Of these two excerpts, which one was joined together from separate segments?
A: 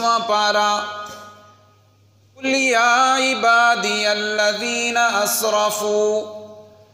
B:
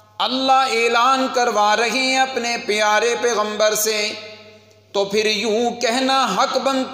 A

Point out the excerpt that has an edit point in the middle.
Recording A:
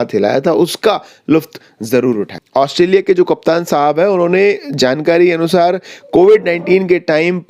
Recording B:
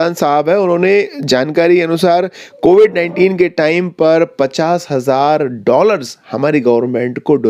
A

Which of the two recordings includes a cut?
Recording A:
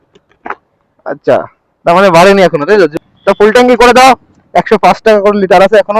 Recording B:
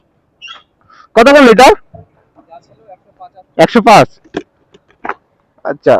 A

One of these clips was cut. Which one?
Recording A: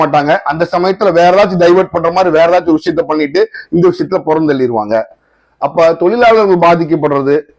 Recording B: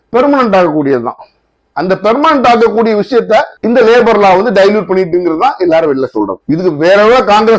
B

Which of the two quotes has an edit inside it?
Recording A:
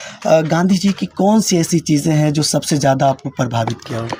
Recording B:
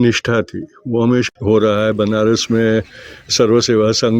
B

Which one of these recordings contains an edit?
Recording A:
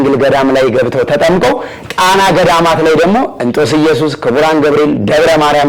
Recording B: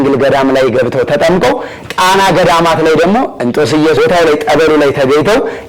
B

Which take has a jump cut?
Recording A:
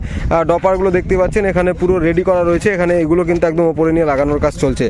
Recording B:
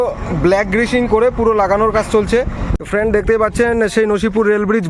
B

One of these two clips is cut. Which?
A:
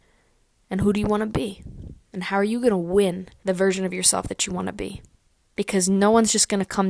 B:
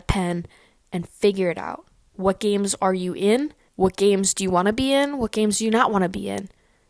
B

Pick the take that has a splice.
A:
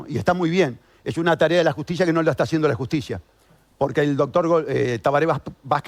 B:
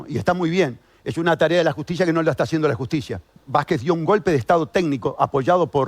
B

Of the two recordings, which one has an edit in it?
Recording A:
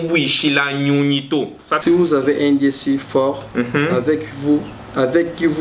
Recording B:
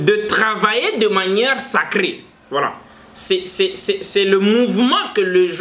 A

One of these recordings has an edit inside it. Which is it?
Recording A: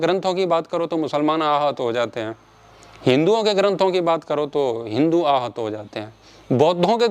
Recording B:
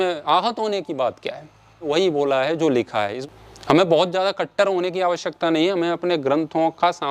B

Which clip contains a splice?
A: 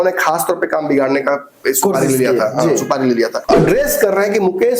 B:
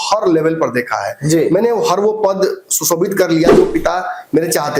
A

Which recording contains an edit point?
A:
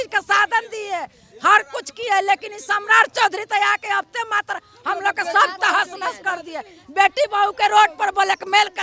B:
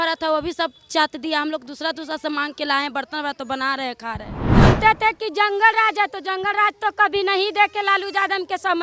B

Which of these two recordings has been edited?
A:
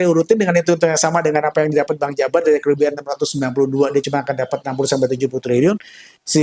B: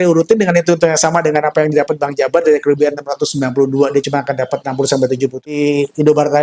B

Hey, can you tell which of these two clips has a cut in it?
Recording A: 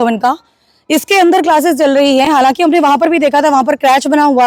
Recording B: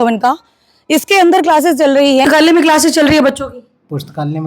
B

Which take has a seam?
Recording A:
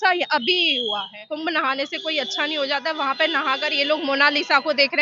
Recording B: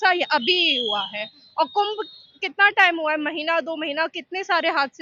A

